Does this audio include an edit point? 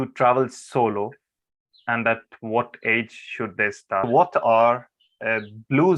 yes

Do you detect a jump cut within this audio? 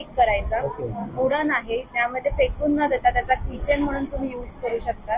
no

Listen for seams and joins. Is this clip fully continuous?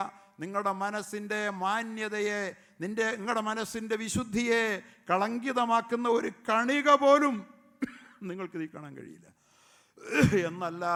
yes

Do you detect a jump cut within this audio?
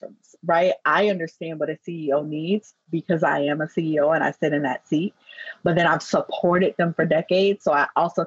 no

